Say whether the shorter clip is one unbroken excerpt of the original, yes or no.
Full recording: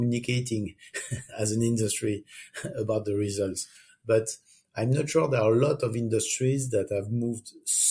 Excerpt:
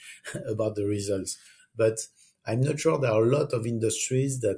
yes